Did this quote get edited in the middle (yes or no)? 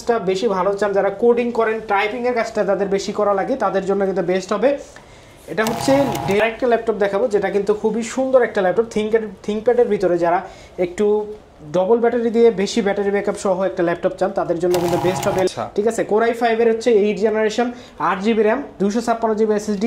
yes